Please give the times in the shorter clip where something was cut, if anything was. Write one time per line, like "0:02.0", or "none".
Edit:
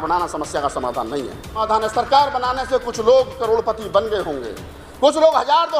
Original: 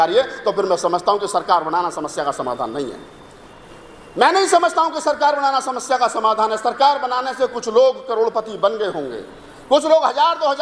0:01.6